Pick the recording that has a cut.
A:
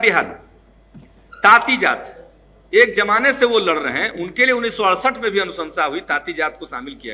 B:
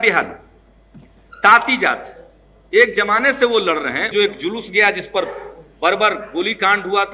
B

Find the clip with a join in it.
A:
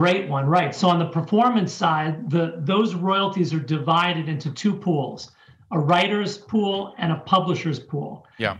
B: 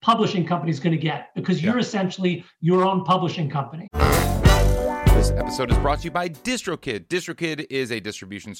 B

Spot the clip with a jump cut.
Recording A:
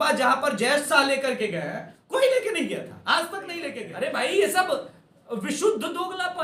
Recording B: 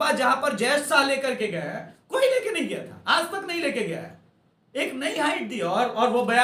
A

